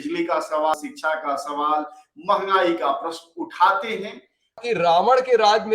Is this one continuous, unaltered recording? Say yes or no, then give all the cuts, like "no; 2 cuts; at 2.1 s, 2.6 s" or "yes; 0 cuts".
no; 2 cuts; at 0.7 s, 4.6 s